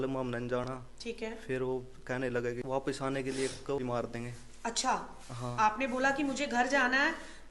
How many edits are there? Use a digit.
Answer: 2